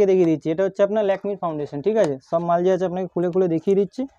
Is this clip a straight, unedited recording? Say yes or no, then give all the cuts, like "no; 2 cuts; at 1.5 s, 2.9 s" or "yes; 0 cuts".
yes; 0 cuts